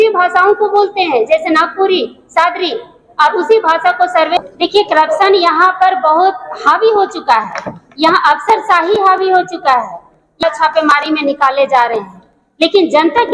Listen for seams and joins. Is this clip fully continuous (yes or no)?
no